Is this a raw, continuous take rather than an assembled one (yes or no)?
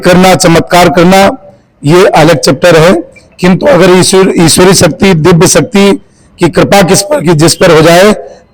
yes